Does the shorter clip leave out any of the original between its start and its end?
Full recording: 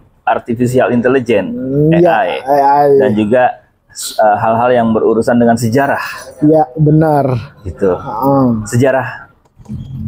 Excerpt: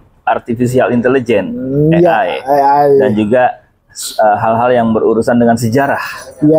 no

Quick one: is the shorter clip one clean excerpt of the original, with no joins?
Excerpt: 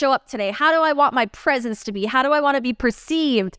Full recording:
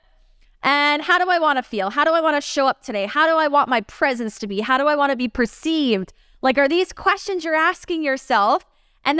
yes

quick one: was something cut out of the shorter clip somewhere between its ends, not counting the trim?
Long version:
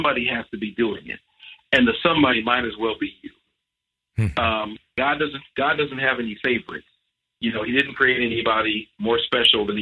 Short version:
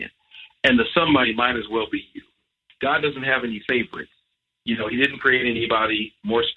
yes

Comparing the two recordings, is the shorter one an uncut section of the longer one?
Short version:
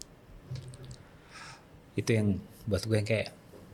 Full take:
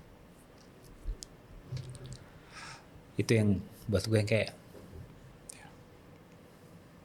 yes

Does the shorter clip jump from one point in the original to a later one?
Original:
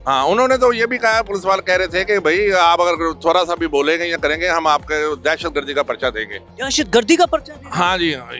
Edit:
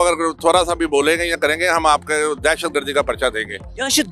no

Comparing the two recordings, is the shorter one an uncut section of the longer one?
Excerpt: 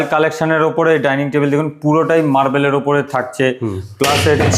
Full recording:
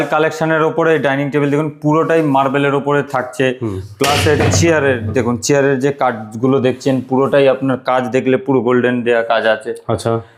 yes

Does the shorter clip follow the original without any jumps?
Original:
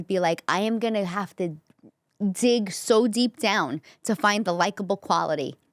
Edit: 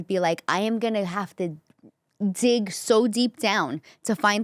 yes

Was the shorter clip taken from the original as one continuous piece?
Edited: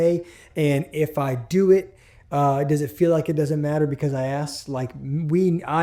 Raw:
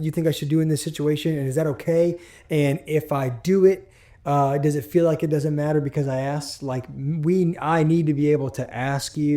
yes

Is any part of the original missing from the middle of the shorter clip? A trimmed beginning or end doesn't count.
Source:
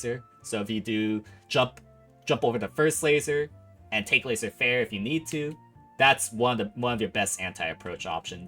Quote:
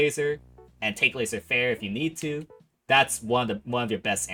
no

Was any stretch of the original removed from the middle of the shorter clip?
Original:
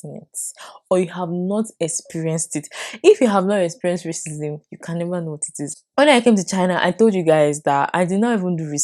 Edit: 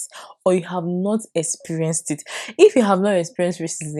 no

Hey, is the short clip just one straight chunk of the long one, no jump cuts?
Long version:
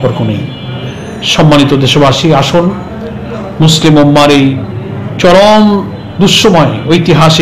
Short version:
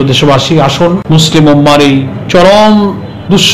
no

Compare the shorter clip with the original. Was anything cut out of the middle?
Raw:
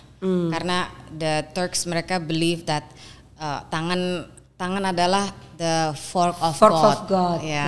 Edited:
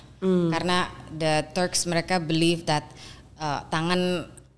no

